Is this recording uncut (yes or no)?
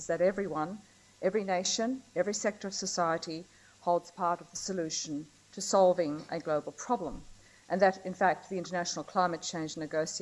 yes